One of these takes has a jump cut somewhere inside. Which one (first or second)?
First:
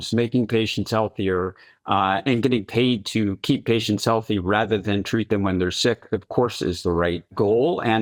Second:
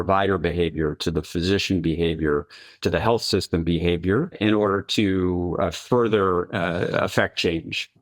second